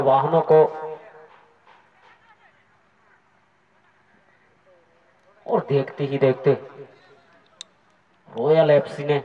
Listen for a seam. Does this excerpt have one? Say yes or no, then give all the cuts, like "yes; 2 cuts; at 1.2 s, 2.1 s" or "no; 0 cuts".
no; 0 cuts